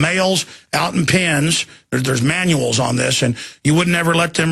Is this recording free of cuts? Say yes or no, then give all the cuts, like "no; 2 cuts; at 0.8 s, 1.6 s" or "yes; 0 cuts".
yes; 0 cuts